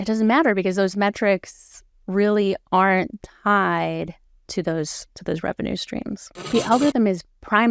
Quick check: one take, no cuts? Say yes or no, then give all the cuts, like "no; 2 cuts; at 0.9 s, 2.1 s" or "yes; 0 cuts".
no; 1 cut; at 6.5 s